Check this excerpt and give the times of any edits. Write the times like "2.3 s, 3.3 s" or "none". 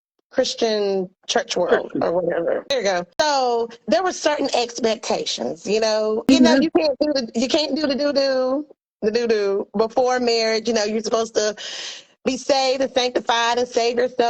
2.7 s, 6.3 s